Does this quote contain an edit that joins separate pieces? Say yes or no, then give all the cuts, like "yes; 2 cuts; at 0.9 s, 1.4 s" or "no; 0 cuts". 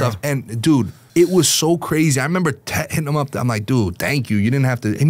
yes; 1 cut; at 1.0 s